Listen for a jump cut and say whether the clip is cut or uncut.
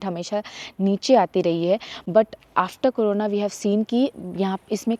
uncut